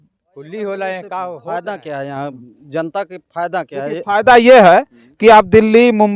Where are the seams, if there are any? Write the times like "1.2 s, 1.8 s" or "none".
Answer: 1.4 s